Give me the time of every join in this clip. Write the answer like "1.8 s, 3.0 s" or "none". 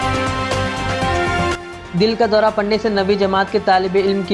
1.5 s